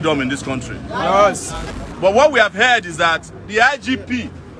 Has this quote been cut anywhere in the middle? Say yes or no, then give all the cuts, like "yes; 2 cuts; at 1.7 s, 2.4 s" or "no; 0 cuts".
yes; 1 cut; at 1.6 s